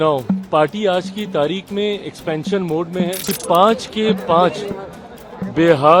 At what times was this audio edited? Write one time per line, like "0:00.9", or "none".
0:03.3